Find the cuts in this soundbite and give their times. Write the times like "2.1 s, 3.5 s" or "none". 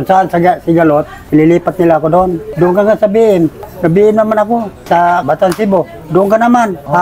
none